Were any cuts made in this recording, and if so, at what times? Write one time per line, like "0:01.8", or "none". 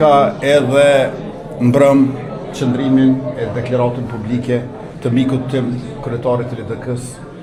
none